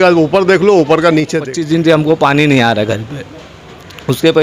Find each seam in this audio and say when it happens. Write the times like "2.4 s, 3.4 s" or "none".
1.6 s